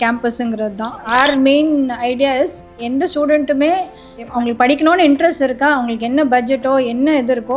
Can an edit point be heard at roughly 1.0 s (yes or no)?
yes